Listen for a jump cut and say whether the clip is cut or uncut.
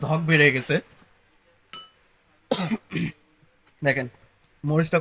uncut